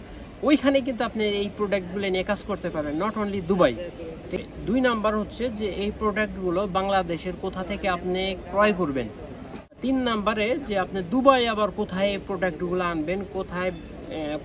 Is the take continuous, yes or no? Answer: no